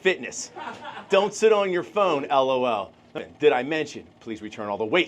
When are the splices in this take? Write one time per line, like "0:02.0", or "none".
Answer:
0:03.3